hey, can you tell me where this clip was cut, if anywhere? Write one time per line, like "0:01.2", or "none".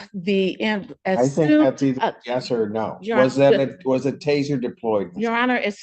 none